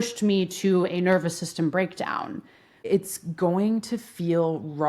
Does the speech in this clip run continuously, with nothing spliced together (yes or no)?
no